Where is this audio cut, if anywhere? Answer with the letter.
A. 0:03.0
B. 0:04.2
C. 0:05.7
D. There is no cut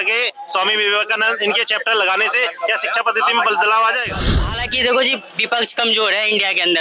B